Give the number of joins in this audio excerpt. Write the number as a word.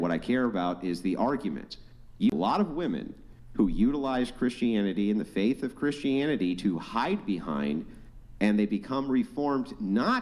one